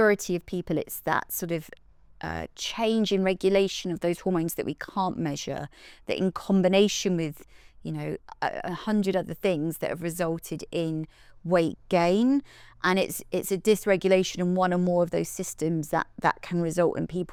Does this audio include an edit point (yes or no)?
no